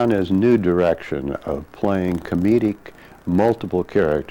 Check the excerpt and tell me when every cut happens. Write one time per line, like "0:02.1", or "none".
none